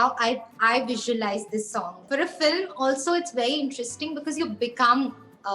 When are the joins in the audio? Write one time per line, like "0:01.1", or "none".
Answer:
0:02.0